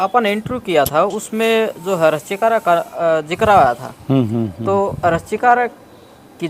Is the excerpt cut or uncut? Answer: uncut